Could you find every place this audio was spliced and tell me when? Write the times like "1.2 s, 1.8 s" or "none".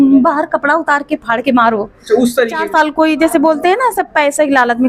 2.6 s